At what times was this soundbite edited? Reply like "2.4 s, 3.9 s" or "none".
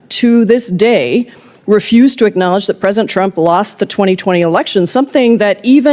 none